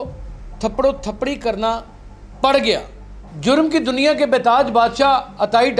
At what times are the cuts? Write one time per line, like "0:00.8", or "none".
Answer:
0:03.1